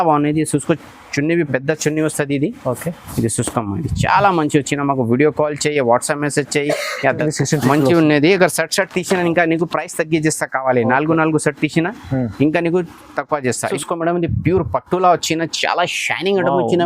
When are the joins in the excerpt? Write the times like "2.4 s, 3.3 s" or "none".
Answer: 7.2 s, 13.7 s